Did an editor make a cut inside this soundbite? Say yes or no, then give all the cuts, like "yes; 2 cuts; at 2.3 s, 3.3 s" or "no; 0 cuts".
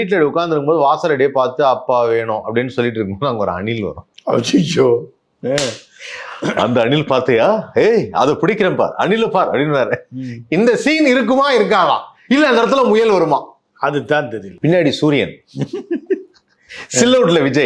yes; 2 cuts; at 4.1 s, 14.4 s